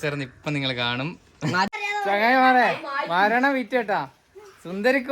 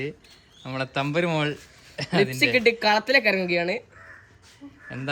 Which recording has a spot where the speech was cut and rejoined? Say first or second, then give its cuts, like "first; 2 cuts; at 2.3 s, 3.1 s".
first; 1 cut; at 1.8 s